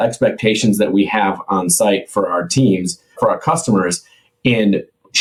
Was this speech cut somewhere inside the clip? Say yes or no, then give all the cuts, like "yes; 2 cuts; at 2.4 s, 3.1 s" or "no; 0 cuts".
no; 0 cuts